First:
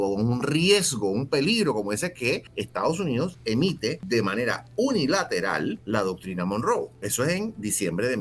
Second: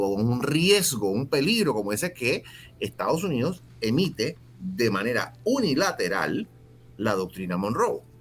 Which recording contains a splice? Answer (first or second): first